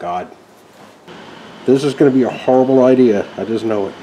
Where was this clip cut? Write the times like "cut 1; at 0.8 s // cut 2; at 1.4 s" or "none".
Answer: cut 1; at 1.1 s